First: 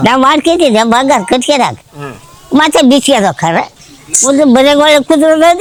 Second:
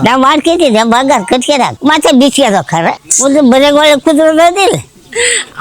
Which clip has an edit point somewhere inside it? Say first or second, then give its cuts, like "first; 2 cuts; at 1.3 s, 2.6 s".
second; 2 cuts; at 1.7 s, 3.0 s